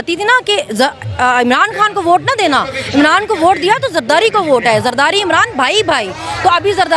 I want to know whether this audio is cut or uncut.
uncut